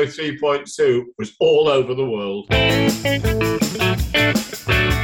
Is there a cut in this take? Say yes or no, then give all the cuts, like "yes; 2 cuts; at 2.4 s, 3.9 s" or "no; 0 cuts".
yes; 1 cut; at 2.4 s